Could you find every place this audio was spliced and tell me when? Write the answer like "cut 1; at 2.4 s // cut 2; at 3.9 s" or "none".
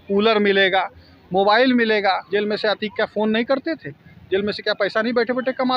cut 1; at 2.2 s